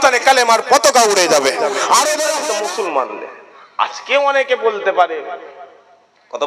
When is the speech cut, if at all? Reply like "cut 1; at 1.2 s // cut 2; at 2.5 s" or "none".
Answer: cut 1; at 2.4 s